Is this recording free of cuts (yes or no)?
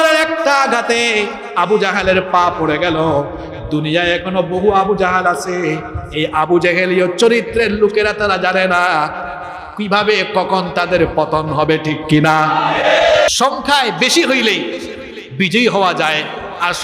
no